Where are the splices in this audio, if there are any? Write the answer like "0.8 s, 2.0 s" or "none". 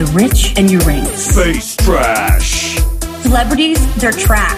none